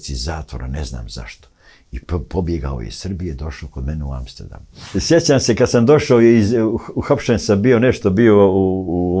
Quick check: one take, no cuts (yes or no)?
no